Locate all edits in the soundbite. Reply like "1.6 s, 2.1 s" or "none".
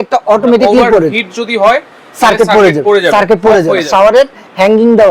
3.9 s